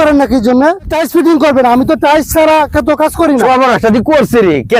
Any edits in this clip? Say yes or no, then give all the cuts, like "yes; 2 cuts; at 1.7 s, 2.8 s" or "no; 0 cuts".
yes; 2 cuts; at 1.0 s, 3.4 s